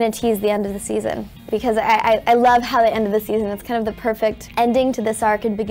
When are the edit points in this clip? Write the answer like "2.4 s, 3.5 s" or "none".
1.4 s, 4.4 s